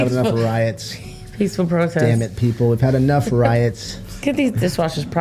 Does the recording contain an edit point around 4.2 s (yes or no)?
yes